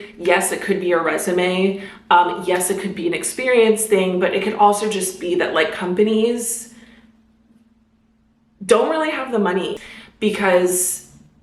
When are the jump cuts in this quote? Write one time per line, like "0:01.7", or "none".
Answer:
0:09.7